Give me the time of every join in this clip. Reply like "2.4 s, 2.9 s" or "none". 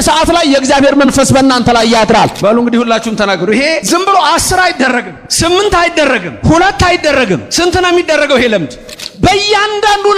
2.4 s, 3.8 s, 5.2 s, 6.3 s, 7.5 s, 9.0 s